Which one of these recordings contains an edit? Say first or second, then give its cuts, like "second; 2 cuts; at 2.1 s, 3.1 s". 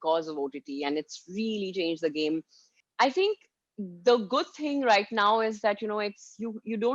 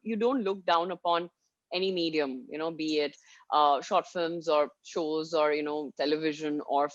first; 1 cut; at 2.8 s